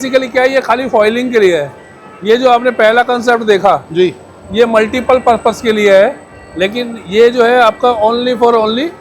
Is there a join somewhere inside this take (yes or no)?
no